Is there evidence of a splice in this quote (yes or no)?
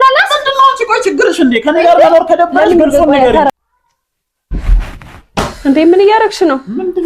yes